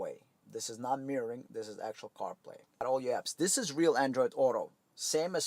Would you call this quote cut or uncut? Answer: cut